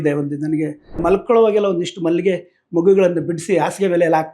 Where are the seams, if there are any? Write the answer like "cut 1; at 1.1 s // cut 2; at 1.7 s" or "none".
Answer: cut 1; at 1.0 s